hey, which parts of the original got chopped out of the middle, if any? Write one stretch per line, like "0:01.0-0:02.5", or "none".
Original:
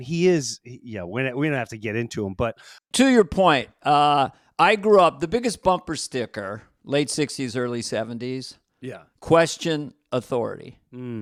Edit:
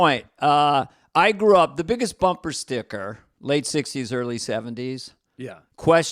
none